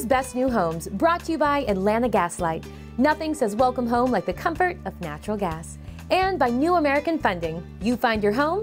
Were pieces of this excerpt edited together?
no; 0 cuts

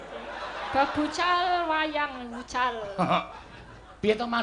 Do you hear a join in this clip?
no; 0 cuts

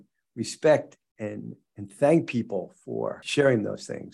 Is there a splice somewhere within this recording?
yes; 1 cut; at 3.2 s

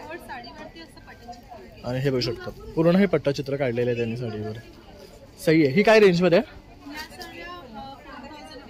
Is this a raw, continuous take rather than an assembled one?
yes; 0 cuts

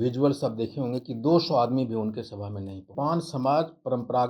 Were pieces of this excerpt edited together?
yes; 1 cut; at 2.9 s

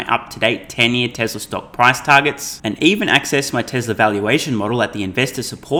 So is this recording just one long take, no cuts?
yes; 0 cuts

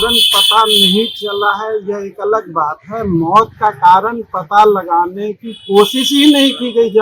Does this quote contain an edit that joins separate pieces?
no; 0 cuts

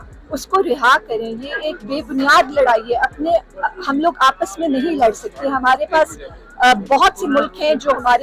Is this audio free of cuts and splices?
yes; 0 cuts

